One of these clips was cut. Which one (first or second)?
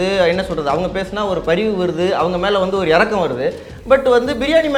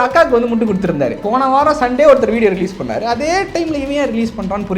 second